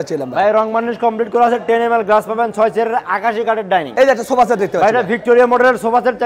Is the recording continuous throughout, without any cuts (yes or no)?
no